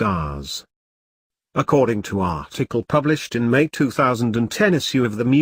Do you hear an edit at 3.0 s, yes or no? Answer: no